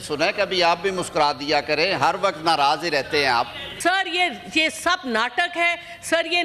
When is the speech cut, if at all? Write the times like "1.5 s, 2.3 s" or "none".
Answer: 3.6 s

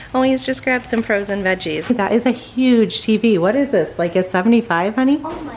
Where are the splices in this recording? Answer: 1.9 s

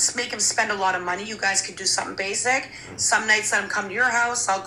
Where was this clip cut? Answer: none

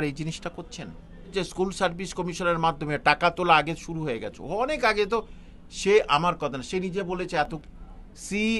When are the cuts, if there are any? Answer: 1.3 s, 7.6 s

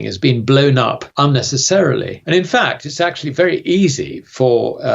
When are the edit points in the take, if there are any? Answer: 1.0 s, 2.1 s

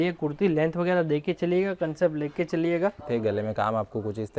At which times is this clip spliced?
3.0 s

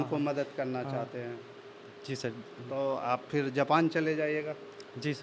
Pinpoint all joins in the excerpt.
none

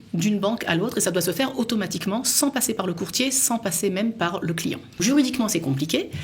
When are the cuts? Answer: 5.0 s

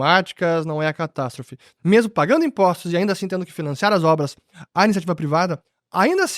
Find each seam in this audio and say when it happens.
1.7 s

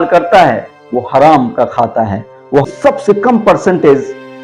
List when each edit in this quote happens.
2.7 s

